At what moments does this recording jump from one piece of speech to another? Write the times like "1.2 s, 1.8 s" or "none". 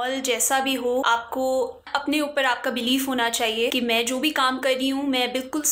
1.0 s, 1.8 s, 3.7 s